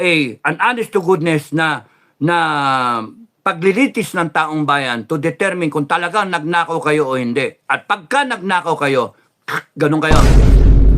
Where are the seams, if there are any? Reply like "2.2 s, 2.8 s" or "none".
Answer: 10.1 s